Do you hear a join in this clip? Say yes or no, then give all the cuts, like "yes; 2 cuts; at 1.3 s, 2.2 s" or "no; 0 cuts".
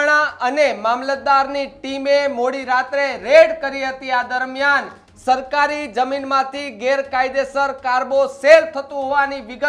no; 0 cuts